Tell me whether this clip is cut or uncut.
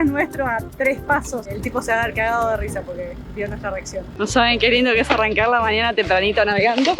cut